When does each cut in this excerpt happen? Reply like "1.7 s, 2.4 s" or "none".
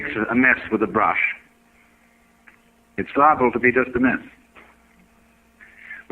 1.3 s